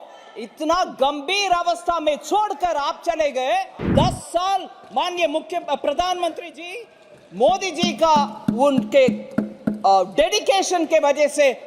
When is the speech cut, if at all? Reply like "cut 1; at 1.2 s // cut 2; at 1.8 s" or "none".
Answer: cut 1; at 3.8 s